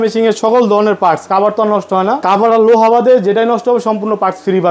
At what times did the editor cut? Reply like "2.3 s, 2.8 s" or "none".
2.2 s